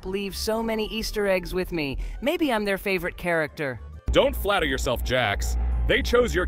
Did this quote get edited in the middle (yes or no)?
no